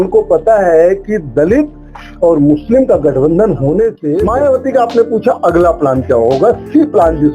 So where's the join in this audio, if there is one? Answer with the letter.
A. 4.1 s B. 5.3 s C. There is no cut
A